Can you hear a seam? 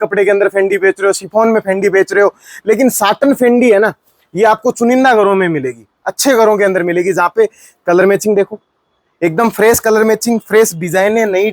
no; 0 cuts

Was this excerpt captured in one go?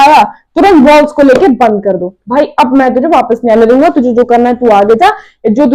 yes; 0 cuts

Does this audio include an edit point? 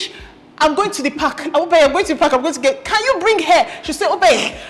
no; 0 cuts

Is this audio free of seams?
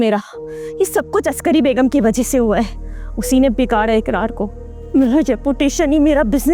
yes; 0 cuts

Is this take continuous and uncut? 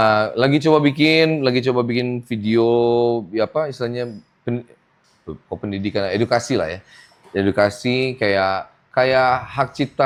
yes; 0 cuts

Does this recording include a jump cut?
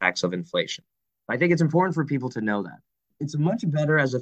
yes; 1 cut; at 3.1 s

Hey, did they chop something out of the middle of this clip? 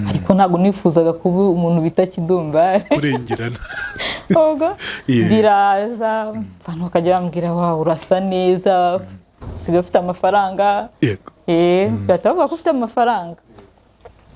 no; 0 cuts

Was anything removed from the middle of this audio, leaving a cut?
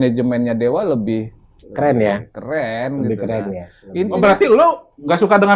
no; 0 cuts

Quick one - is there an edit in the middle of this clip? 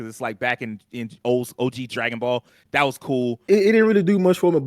yes; 1 cut; at 3.4 s

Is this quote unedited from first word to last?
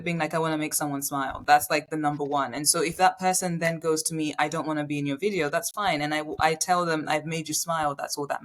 yes; 0 cuts

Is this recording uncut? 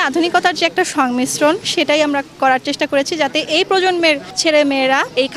yes; 0 cuts

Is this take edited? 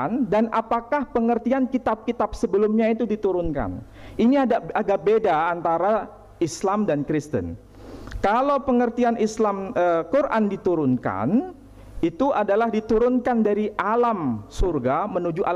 no; 0 cuts

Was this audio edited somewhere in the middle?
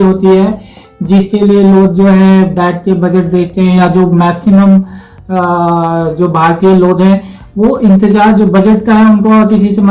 no; 0 cuts

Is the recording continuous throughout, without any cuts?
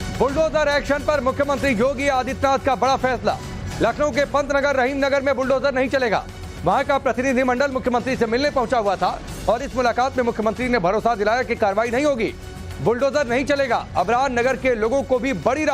no; 1 cut; at 3.0 s

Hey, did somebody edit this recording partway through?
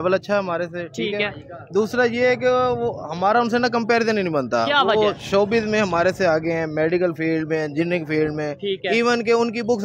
no; 0 cuts

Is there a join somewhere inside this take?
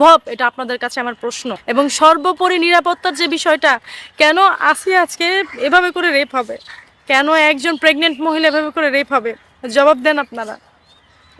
yes; 1 cut; at 1.5 s

